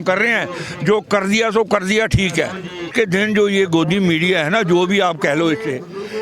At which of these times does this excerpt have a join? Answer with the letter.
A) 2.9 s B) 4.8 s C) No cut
A